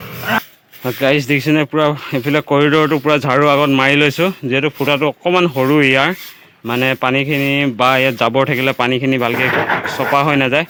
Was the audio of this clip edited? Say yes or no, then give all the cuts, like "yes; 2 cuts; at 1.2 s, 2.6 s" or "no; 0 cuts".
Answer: no; 0 cuts